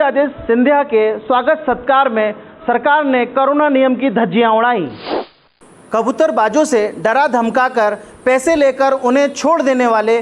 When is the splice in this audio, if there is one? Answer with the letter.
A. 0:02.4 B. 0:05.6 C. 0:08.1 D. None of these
B